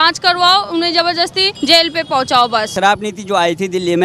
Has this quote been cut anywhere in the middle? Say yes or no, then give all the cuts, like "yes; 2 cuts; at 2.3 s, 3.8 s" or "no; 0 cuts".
yes; 2 cuts; at 1.5 s, 2.7 s